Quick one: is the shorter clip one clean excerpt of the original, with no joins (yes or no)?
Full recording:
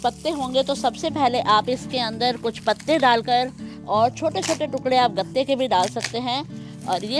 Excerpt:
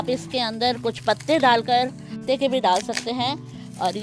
no